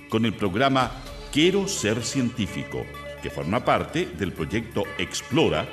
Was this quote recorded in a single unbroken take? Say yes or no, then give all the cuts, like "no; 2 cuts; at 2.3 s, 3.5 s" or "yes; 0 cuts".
yes; 0 cuts